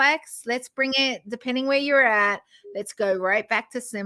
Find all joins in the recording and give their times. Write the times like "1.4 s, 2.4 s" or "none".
none